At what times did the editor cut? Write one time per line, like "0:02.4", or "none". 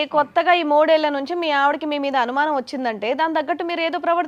none